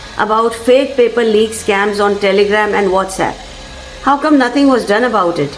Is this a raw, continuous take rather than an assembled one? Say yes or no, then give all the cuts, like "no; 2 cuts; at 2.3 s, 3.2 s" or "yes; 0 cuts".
yes; 0 cuts